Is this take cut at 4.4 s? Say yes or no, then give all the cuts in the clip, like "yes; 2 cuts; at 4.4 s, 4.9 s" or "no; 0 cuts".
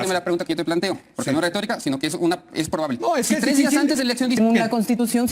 yes; 1 cut; at 4.4 s